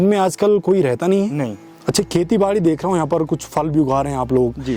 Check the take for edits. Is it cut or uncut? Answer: uncut